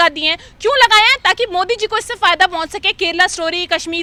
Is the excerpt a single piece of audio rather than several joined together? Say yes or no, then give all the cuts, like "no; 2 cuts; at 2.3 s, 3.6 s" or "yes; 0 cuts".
yes; 0 cuts